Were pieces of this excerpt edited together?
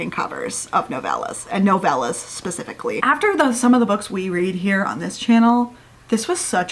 yes; 1 cut; at 3.0 s

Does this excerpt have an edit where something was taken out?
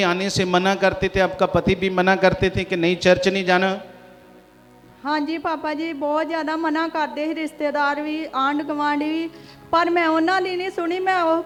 no; 0 cuts

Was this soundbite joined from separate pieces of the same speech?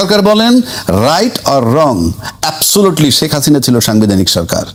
no; 0 cuts

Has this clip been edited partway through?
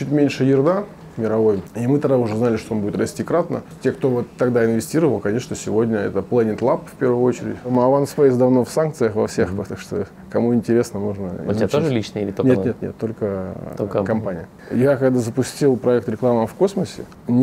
yes; 4 cuts; at 1.7 s, 3.7 s, 7.7 s, 14.6 s

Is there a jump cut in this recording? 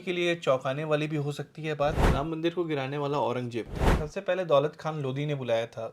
yes; 2 cuts; at 2.0 s, 3.9 s

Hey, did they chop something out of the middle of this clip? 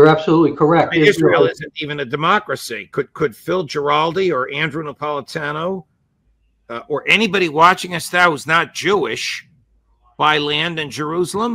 no; 0 cuts

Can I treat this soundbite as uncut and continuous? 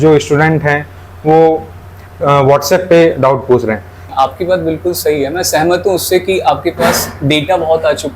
no; 1 cut; at 4.0 s

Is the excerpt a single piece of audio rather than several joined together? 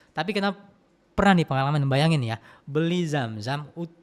yes; 0 cuts

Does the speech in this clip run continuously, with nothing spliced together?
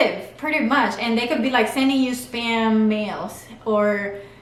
yes; 0 cuts

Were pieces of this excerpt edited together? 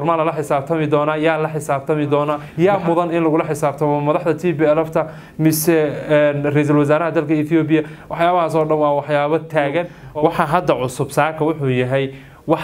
yes; 2 cuts; at 2.4 s, 10.0 s

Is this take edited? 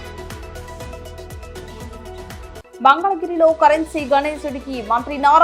yes; 2 cuts; at 1.1 s, 2.6 s

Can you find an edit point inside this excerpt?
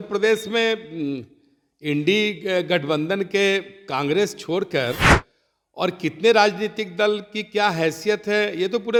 no; 0 cuts

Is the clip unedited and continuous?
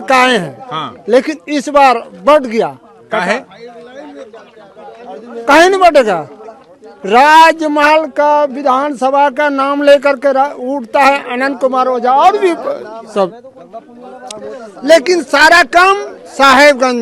yes; 0 cuts

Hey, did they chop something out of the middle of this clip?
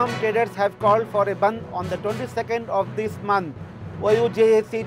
no; 0 cuts

